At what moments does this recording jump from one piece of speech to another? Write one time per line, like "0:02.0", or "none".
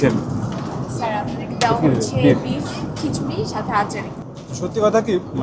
0:04.2